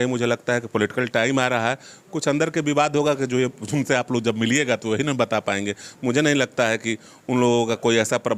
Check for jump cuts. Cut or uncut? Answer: uncut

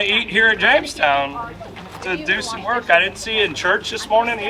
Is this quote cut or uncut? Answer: uncut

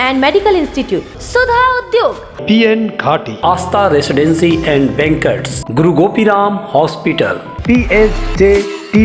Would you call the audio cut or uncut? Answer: uncut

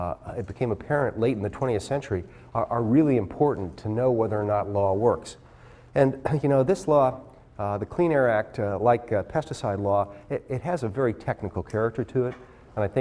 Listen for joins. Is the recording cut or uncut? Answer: cut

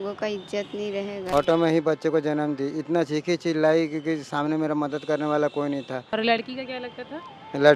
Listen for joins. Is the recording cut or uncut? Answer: cut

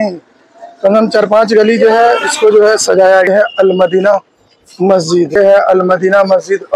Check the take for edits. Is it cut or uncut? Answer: cut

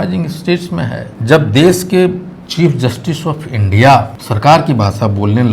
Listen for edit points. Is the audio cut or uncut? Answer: cut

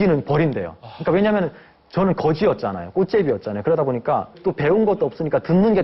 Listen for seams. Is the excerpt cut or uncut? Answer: cut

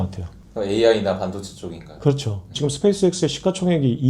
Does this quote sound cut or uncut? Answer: cut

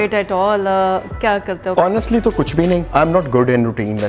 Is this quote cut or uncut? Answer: cut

